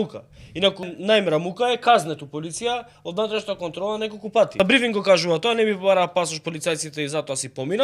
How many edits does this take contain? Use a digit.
2